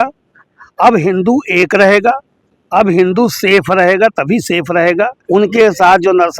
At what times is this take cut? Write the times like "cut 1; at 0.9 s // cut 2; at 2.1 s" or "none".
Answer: cut 1; at 5.2 s